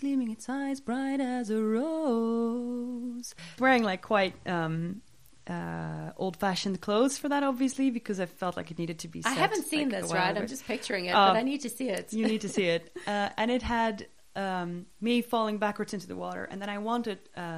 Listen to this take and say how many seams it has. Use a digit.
1